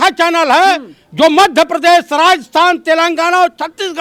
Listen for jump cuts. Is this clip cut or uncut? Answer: uncut